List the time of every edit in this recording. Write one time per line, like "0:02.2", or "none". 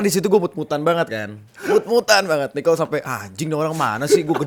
none